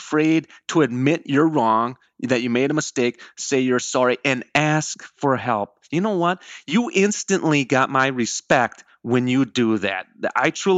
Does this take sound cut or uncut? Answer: cut